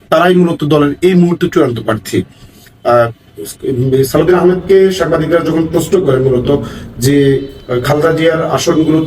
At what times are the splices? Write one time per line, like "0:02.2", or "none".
none